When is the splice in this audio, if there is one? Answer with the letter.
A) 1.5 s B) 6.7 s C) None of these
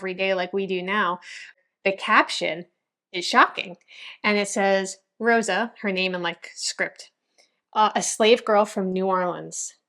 A